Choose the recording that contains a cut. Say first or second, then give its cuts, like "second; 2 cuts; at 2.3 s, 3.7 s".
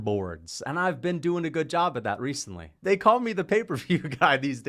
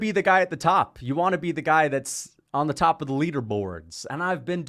first; 1 cut; at 2.8 s